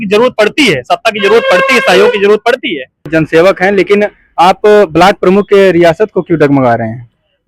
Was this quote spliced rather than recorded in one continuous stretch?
yes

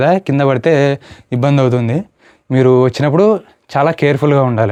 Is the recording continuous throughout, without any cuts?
yes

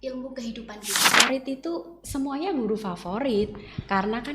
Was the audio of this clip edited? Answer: yes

